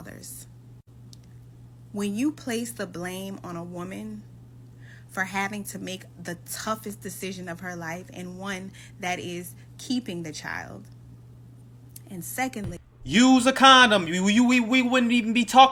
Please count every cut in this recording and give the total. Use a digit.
0